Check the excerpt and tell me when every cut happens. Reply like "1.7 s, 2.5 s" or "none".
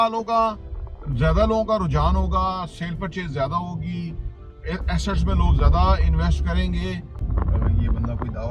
7.2 s